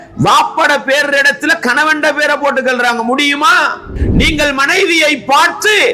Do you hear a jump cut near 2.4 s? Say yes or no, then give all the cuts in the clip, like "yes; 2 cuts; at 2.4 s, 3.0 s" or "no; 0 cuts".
no; 1 cut; at 3.9 s